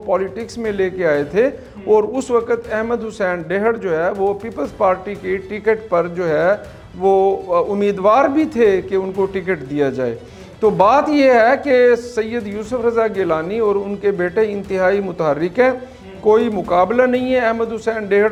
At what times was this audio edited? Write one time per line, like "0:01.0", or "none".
none